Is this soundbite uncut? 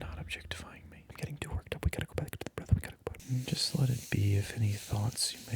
no; 2 cuts; at 1.1 s, 3.2 s

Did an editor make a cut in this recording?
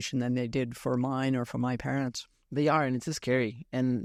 no; 0 cuts

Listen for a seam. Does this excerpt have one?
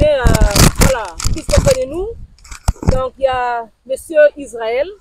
no; 0 cuts

